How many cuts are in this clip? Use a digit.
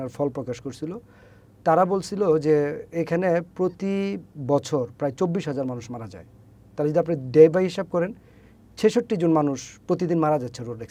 0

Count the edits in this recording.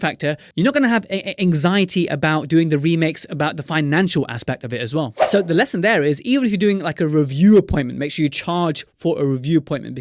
1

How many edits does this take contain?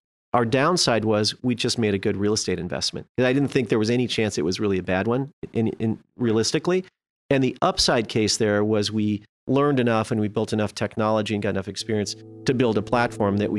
0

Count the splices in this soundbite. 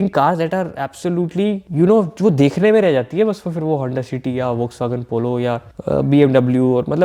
2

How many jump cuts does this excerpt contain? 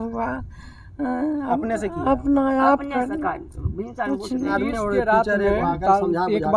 1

